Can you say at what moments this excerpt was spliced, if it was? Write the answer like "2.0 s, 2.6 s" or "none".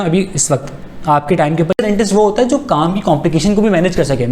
1.8 s